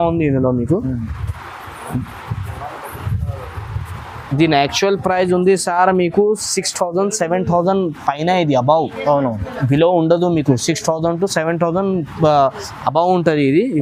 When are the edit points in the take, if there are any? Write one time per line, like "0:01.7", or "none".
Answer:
none

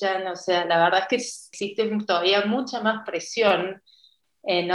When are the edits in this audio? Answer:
0:01.4

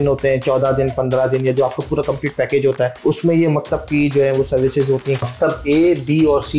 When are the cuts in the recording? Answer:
0:03.0
0:05.2

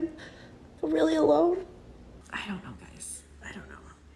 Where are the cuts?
0:02.1

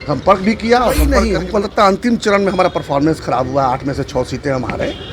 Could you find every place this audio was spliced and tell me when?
0:01.3

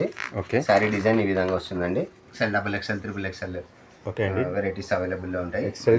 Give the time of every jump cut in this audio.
0:02.2

